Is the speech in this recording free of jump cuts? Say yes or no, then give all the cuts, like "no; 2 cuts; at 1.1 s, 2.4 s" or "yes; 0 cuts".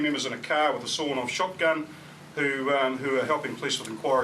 yes; 0 cuts